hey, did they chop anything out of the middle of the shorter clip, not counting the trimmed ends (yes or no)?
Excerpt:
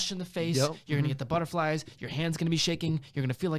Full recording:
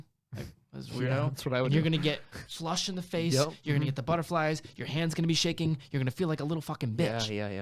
no